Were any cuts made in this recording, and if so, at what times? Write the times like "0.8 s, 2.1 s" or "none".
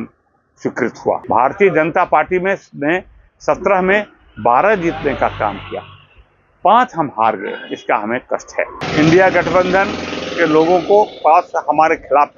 1.2 s, 8.8 s